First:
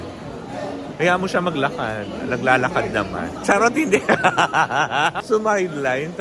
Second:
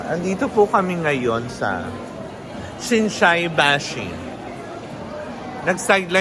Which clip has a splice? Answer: first; 1 cut; at 5.2 s

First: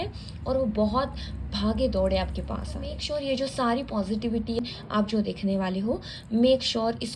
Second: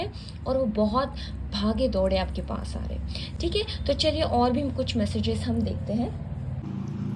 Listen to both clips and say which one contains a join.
first; 2 cuts; at 3.0 s, 4.6 s

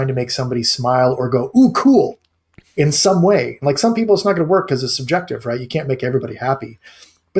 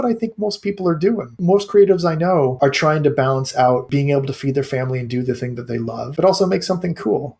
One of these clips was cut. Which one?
second; 4 cuts; at 1.4 s, 2.5 s, 3.9 s, 6.1 s

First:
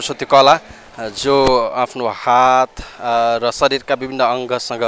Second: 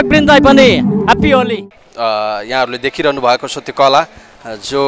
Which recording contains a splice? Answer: second; 1 cut; at 1.5 s

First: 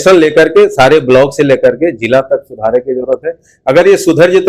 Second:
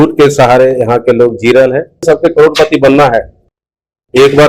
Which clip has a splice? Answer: second; 1 cut; at 2.0 s

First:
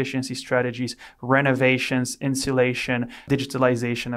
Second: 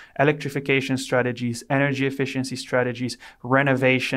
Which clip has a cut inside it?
first; 1 cut; at 3.2 s

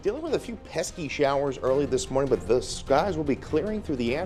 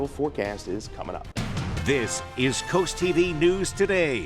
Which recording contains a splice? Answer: second; 1 cut; at 1.3 s

